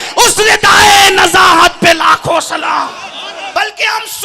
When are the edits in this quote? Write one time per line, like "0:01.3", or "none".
0:03.3